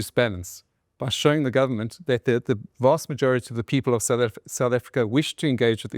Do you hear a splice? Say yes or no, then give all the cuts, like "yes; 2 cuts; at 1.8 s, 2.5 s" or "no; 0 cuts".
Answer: no; 0 cuts